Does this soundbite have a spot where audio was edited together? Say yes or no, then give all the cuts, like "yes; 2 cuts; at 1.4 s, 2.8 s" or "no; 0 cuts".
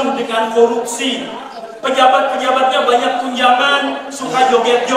no; 0 cuts